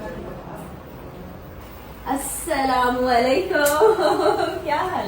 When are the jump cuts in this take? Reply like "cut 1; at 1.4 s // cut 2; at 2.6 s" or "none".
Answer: cut 1; at 1.6 s